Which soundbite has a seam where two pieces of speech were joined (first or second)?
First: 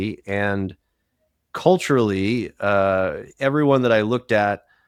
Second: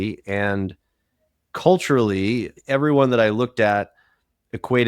second